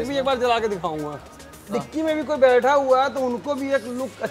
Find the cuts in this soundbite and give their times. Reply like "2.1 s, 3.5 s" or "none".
1.7 s